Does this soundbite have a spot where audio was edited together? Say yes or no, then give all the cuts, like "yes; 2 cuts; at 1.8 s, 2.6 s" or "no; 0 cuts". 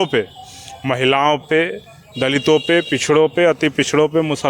no; 0 cuts